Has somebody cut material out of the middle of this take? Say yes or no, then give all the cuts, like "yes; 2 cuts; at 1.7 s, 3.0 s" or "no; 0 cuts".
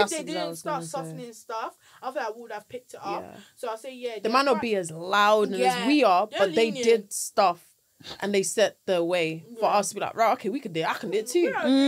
no; 0 cuts